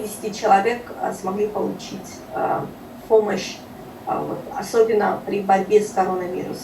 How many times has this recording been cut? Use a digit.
0